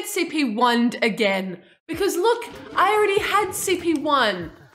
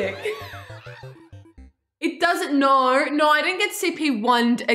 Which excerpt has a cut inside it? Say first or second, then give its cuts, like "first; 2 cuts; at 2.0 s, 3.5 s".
second; 1 cut; at 1.2 s